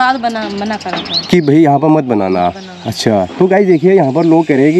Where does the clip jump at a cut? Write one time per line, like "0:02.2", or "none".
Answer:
none